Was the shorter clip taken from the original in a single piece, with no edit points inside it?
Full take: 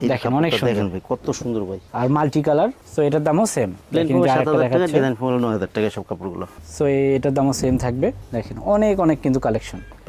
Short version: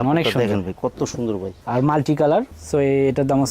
no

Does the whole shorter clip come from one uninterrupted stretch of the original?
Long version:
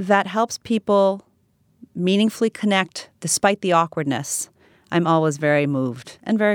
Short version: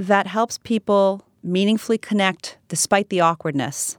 no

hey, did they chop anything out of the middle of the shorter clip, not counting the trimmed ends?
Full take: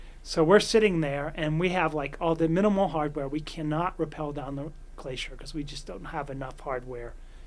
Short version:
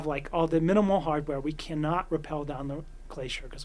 no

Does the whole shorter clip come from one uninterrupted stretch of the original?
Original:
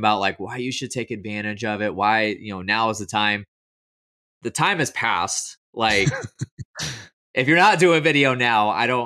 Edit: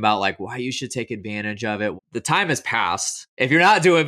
no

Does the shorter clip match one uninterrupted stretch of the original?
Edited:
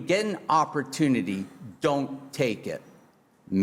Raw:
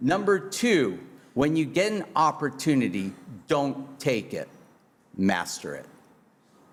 yes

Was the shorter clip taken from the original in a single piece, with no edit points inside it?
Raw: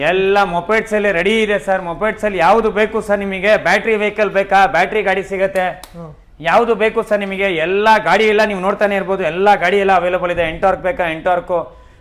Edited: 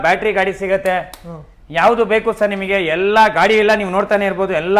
yes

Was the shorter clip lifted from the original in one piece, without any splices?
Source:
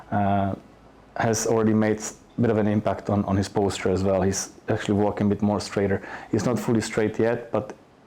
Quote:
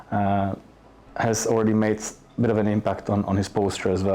yes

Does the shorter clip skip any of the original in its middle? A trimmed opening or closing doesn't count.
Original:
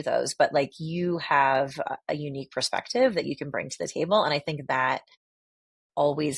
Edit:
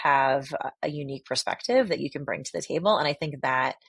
no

